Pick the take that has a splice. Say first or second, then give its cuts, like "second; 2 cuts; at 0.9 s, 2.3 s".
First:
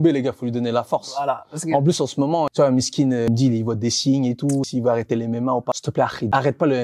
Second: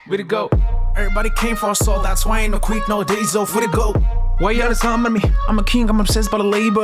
first; 4 cuts; at 2.5 s, 3.3 s, 4.7 s, 5.9 s